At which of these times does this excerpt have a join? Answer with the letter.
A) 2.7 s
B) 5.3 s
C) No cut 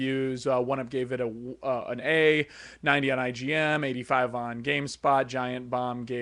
B